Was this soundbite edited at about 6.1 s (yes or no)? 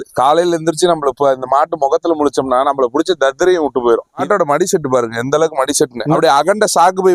yes